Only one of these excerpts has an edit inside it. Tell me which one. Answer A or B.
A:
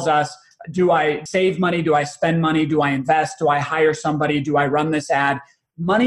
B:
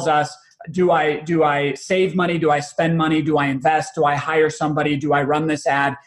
A